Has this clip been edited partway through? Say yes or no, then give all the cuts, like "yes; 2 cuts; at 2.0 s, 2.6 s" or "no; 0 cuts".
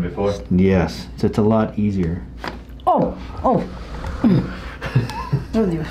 no; 0 cuts